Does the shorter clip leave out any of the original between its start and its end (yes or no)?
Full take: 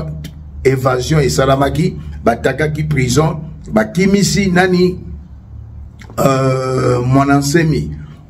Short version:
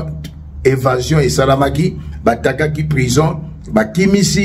no